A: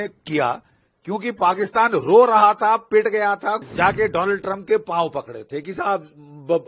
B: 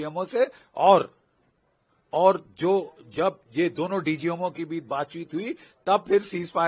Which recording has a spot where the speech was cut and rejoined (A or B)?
A